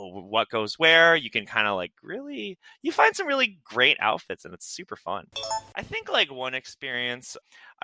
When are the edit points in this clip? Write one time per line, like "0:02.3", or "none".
0:05.6